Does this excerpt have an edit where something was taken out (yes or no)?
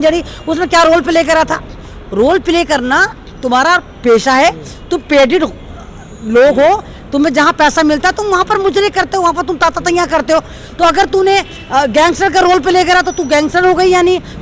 no